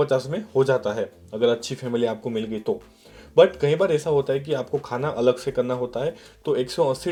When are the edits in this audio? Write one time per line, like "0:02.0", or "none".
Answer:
none